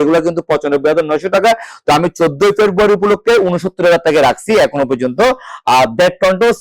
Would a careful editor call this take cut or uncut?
uncut